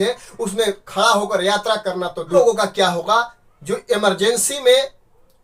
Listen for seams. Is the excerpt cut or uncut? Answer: cut